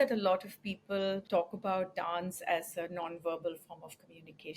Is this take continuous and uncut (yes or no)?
no